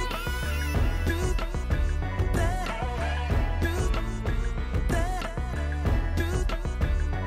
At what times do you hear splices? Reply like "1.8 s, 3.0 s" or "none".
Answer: 2.8 s